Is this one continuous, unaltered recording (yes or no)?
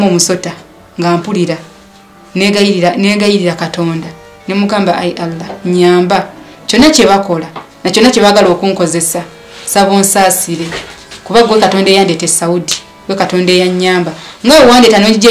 yes